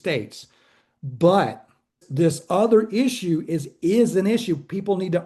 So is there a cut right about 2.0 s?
yes; 1 cut; at 2.0 s

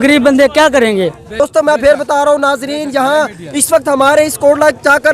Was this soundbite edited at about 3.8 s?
no; 1 cut; at 1.4 s

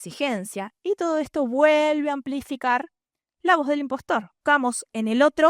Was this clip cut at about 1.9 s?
no; 1 cut; at 4.3 s

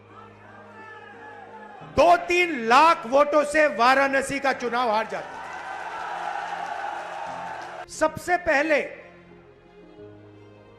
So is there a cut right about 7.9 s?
yes; 1 cut; at 7.9 s

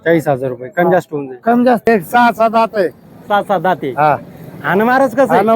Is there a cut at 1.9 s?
yes; 1 cut; at 1.9 s

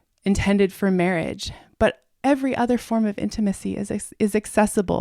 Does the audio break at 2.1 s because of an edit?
yes; 1 cut; at 2.1 s

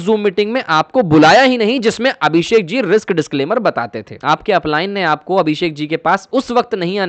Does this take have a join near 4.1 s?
yes; 1 cut; at 4.1 s

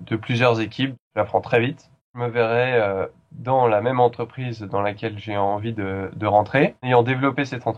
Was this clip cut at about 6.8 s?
yes; 3 cuts; at 1.0 s, 2.2 s, 6.8 s

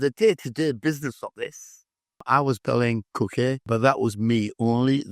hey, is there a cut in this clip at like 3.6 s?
yes; 2 cuts; at 2.2 s, 3.6 s

